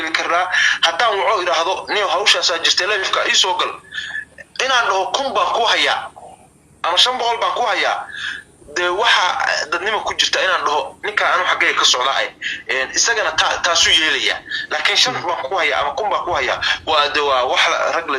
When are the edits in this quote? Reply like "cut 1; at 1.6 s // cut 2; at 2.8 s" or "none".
none